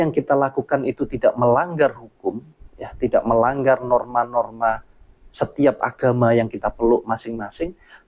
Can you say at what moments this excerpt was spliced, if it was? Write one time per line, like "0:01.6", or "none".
none